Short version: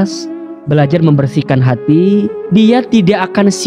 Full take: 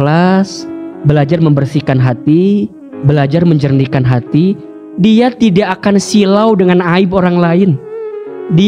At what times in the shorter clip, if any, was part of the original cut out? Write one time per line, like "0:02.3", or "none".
0:02.4